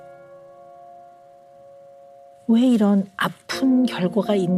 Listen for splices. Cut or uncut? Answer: uncut